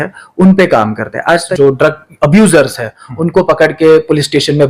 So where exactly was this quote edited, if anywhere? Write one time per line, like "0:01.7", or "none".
0:01.5